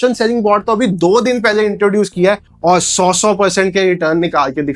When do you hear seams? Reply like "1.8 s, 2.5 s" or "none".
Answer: none